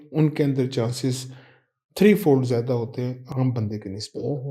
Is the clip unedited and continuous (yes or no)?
yes